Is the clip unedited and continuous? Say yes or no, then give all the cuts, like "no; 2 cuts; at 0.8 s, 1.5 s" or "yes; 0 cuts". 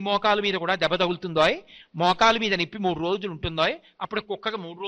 yes; 0 cuts